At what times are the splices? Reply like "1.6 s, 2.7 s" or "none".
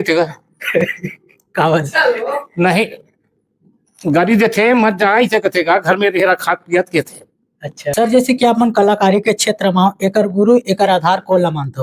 none